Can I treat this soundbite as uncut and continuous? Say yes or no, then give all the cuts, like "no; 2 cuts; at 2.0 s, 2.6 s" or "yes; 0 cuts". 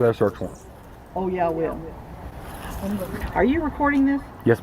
no; 1 cut; at 3.2 s